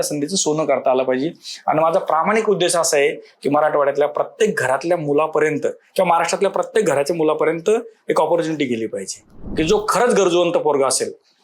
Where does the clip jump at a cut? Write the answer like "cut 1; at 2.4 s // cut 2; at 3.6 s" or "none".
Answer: cut 1; at 9.4 s